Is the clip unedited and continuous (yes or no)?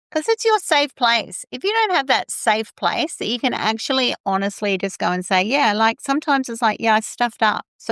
yes